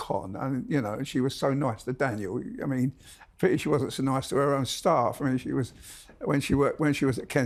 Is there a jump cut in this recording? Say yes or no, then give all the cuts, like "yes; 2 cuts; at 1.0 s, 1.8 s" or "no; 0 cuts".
no; 0 cuts